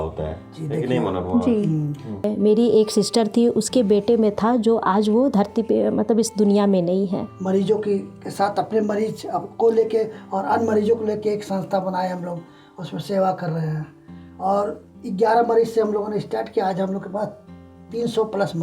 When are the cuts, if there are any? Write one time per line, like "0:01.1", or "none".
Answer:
0:02.3
0:07.3